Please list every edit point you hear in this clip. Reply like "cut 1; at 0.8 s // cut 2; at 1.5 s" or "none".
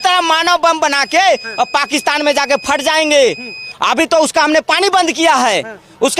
none